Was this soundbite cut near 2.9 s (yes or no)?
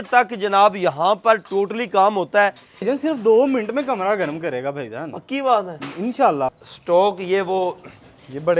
yes